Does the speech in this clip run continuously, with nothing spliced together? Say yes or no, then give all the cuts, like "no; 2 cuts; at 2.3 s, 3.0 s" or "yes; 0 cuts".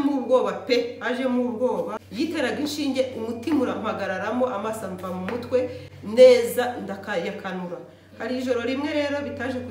no; 1 cut; at 2.0 s